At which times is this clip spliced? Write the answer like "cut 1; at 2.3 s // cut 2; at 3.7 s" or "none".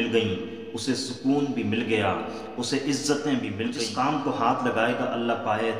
cut 1; at 3.7 s